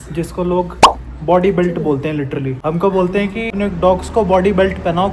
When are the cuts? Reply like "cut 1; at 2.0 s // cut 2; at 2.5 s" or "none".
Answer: cut 1; at 2.5 s // cut 2; at 3.5 s